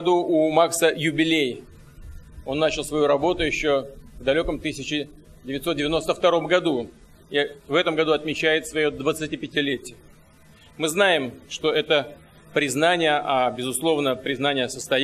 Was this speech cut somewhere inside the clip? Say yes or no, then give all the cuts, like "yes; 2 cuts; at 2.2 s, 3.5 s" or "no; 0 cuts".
yes; 1 cut; at 11.5 s